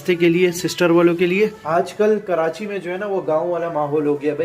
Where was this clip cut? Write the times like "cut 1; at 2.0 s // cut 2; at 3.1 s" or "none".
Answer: cut 1; at 1.6 s